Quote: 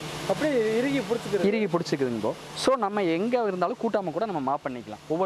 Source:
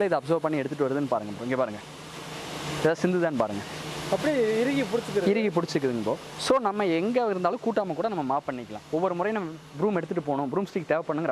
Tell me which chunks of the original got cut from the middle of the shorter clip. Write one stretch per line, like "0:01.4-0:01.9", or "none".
none